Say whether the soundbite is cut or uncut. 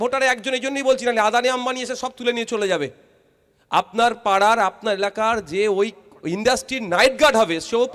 uncut